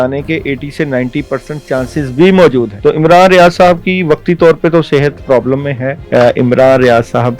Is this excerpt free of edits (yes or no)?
no